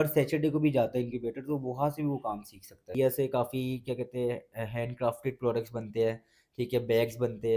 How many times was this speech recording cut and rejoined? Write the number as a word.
one